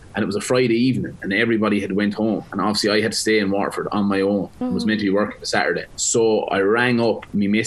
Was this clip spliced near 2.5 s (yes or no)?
yes